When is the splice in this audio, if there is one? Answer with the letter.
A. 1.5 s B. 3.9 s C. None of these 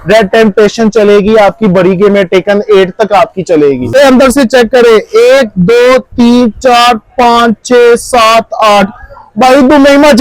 B